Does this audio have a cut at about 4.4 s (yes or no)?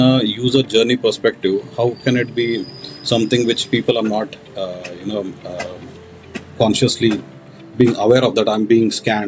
no